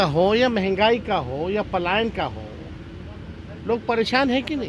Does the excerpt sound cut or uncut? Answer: uncut